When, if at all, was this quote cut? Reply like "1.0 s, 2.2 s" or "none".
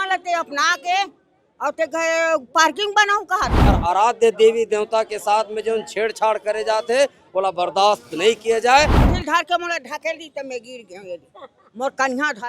3.6 s, 9.1 s